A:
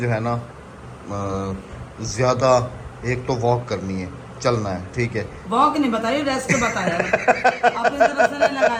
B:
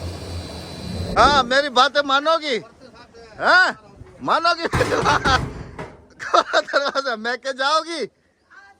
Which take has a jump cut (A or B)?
B